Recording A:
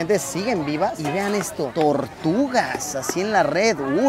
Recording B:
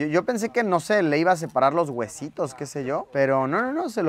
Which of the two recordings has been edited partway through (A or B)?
A